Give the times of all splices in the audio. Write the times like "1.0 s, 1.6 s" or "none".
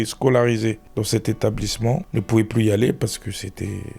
none

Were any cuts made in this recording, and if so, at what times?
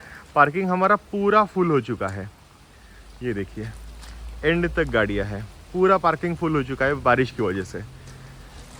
none

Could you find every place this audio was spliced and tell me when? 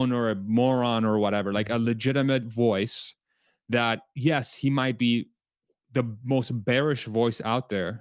none

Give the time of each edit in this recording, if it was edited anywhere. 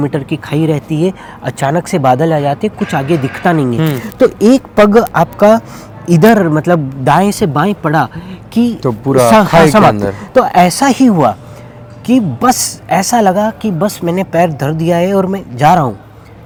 none

